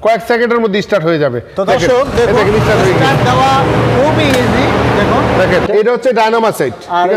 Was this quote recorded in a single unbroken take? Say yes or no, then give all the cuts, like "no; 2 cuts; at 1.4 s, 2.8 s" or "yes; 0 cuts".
no; 1 cut; at 5.6 s